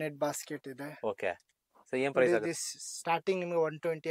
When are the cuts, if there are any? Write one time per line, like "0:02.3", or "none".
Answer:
none

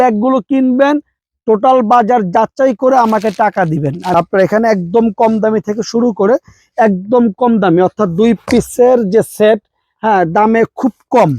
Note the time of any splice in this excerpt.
0:04.1

